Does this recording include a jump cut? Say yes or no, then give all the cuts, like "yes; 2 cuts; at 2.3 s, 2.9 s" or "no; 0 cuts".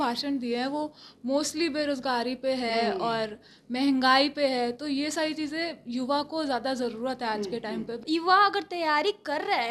yes; 1 cut; at 8.0 s